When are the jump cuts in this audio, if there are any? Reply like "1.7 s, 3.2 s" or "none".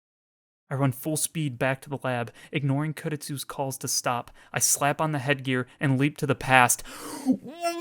none